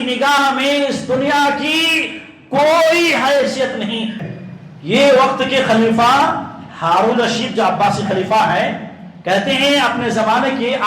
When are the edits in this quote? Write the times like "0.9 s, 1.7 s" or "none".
4.2 s

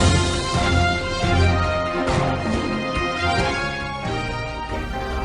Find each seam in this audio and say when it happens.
1.0 s

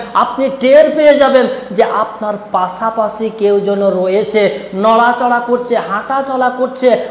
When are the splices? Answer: none

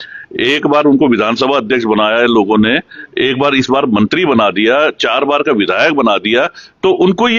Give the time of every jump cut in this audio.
none

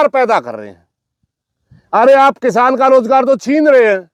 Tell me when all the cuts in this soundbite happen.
none

